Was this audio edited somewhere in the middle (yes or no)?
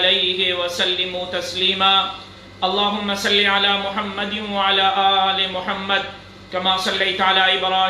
yes